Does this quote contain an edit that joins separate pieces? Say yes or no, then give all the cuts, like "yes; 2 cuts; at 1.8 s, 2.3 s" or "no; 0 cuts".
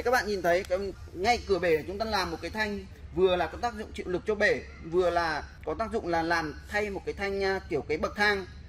yes; 2 cuts; at 1.0 s, 5.5 s